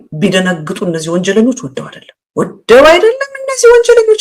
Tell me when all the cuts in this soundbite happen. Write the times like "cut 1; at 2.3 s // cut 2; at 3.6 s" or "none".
none